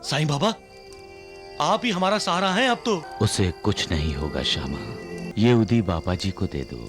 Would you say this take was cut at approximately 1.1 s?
no; 2 cuts; at 3.1 s, 5.3 s

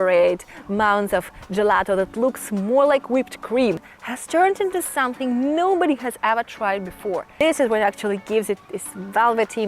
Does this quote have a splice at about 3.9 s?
yes; 2 cuts; at 3.9 s, 7.4 s

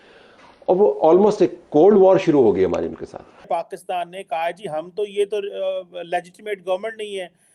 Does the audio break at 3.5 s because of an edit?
yes; 1 cut; at 3.5 s

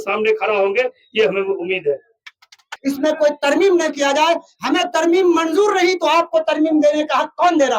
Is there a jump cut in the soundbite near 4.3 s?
no; 1 cut; at 2.6 s

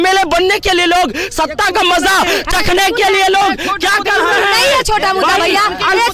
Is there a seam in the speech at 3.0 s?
no; 0 cuts

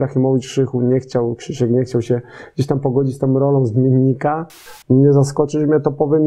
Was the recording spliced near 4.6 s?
yes; 1 cut; at 4.6 s

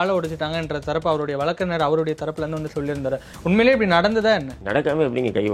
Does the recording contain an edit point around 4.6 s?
yes; 1 cut; at 4.6 s

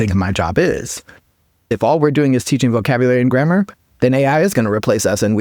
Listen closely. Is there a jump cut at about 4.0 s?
no; 1 cut; at 1.7 s

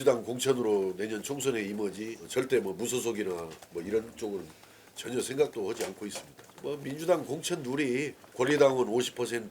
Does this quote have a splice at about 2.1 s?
yes; 2 cuts; at 2.1 s, 6.4 s

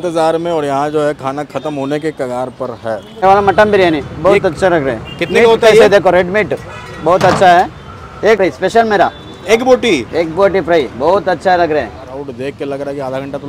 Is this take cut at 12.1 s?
yes; 3 cuts; at 3.1 s, 8.4 s, 12.1 s

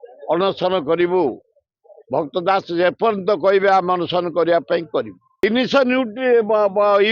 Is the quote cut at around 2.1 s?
no; 1 cut; at 5.4 s

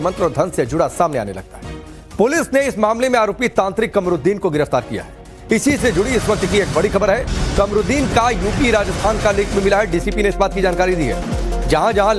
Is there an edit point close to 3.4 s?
yes; 1 cut; at 3.4 s

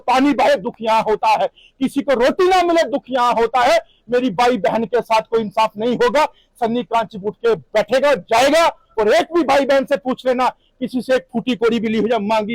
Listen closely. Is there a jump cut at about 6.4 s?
no; 0 cuts

